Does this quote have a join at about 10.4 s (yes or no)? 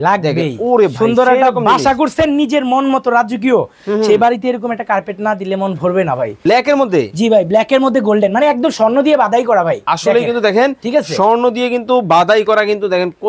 no